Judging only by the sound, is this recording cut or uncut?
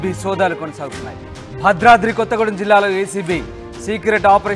uncut